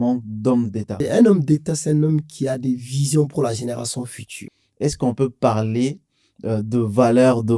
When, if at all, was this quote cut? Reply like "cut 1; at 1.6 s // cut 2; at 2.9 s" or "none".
cut 1; at 1.0 s // cut 2; at 4.4 s

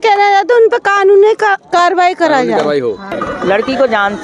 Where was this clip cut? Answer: cut 1; at 3.2 s

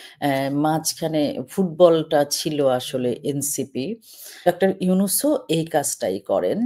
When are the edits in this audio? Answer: cut 1; at 4.5 s

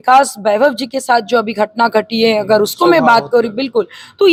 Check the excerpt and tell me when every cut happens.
none

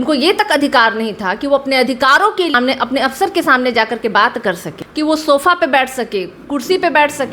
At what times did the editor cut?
cut 1; at 2.6 s // cut 2; at 4.8 s

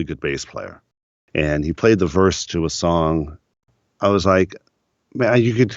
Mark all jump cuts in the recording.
cut 1; at 0.9 s // cut 2; at 3.8 s

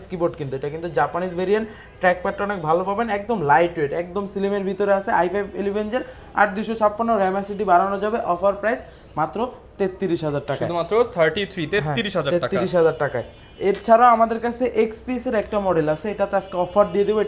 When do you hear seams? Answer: none

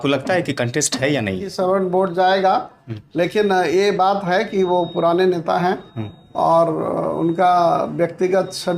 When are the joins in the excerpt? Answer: cut 1; at 1.5 s

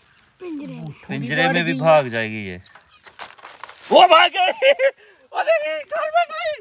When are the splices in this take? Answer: none

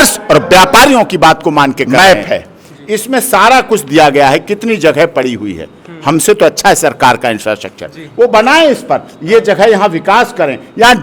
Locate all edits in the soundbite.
cut 1; at 1.9 s

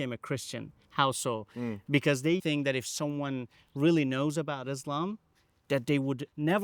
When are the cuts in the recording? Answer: cut 1; at 2.4 s

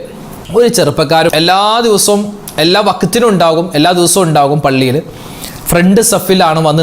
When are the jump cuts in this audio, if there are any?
cut 1; at 1.3 s

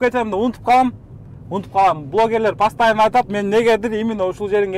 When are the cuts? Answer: none

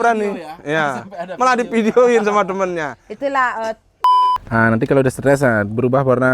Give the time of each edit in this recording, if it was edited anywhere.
cut 1; at 4.0 s

